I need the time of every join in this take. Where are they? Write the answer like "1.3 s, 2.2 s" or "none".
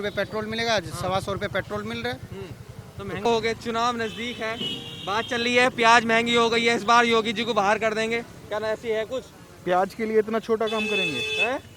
3.3 s